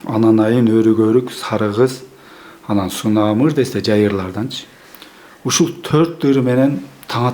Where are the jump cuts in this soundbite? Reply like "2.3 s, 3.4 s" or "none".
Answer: none